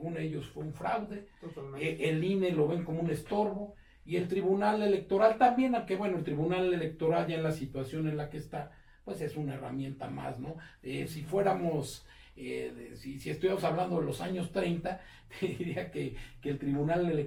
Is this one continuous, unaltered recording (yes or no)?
yes